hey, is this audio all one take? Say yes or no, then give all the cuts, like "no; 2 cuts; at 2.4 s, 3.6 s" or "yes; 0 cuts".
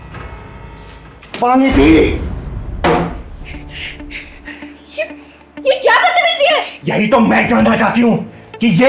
no; 1 cut; at 1.4 s